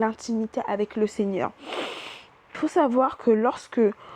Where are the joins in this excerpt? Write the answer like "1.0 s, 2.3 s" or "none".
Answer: 2.6 s